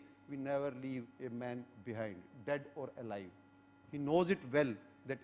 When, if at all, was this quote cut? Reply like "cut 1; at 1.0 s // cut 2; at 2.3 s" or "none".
none